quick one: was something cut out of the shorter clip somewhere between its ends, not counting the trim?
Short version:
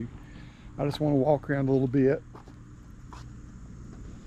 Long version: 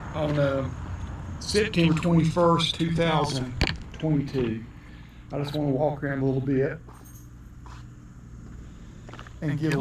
no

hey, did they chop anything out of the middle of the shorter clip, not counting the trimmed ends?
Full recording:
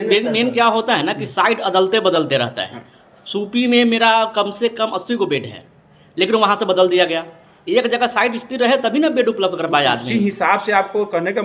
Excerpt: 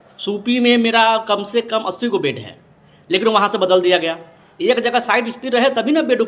no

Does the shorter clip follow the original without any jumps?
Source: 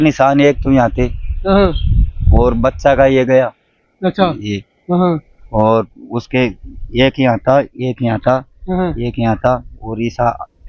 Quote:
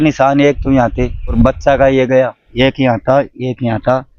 no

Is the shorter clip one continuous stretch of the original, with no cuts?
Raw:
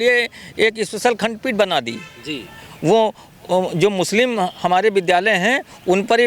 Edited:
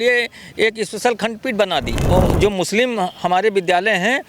no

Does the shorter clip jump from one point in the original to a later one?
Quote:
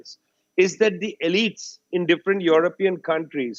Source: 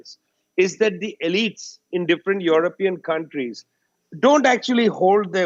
no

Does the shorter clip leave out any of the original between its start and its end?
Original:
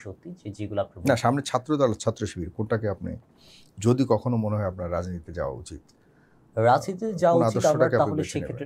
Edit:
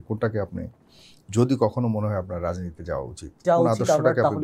yes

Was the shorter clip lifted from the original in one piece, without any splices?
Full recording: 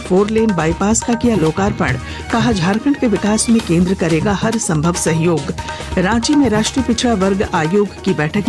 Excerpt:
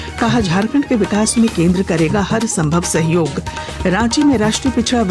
yes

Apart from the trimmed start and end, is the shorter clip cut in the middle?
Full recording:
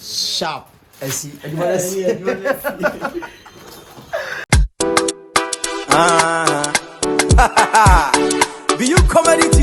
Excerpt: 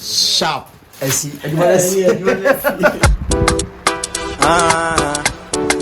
yes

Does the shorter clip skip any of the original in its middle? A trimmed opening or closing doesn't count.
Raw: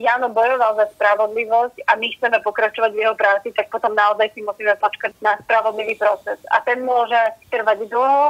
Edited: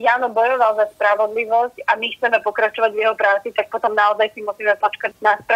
no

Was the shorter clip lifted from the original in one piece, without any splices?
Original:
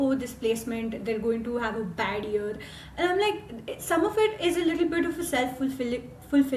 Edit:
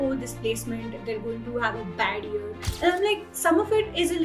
no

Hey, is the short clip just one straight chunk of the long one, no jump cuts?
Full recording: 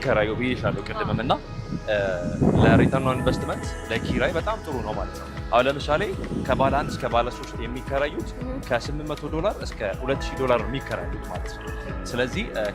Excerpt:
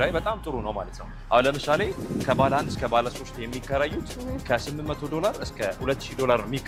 yes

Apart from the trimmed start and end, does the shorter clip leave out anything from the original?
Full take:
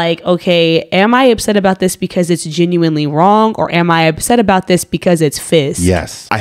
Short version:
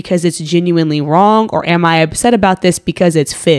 no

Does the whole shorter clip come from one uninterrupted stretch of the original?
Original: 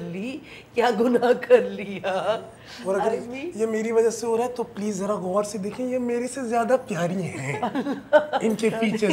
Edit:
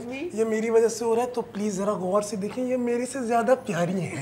yes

